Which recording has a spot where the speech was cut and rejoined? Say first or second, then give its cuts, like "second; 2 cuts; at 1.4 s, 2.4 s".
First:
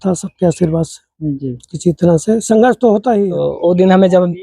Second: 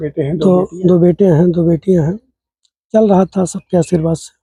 first; 1 cut; at 3.4 s